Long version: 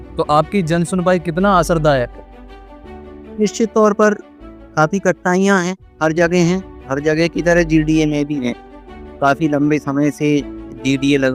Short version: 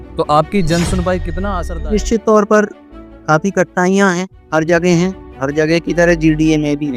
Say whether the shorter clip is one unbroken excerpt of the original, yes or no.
no